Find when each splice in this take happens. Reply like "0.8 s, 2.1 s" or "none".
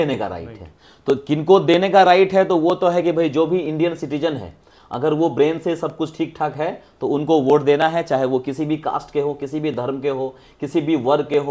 none